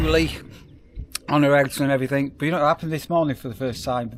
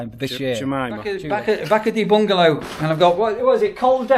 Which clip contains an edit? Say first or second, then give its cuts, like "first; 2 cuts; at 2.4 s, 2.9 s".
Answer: second; 1 cut; at 1.1 s